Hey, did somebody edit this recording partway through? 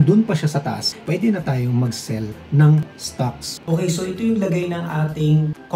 yes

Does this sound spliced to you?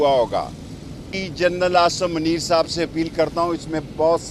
yes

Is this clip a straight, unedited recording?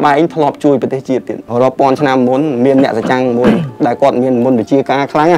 no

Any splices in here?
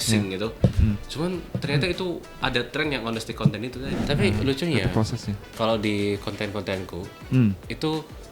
yes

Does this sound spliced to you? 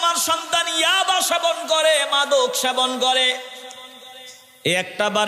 no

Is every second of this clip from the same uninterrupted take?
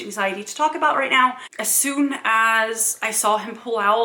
no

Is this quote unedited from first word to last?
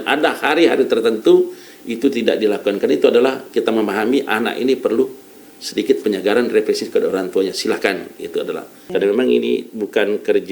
no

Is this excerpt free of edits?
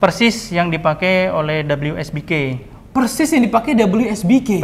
yes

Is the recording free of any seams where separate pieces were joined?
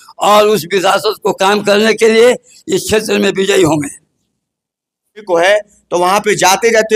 yes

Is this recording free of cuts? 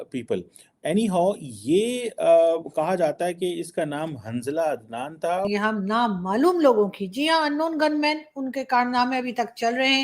no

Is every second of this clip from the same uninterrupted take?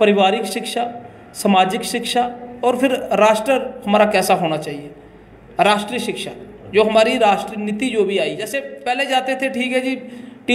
no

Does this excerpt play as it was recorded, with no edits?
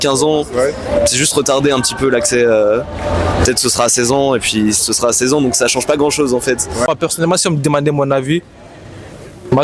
no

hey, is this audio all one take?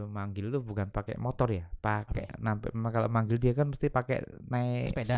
yes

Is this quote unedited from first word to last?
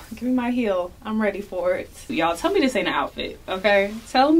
no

